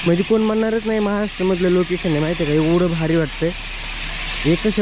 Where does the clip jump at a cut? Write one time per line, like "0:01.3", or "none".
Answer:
none